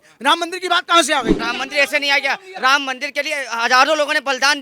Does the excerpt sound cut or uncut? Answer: cut